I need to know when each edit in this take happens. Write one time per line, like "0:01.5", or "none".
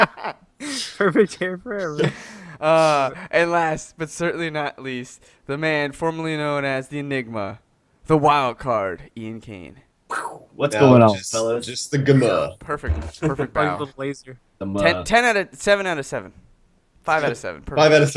0:01.7